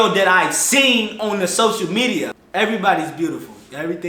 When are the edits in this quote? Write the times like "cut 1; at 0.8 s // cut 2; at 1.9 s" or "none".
cut 1; at 2.3 s